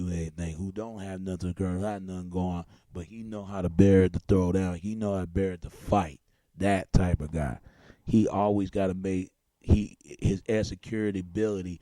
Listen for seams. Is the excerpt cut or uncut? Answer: cut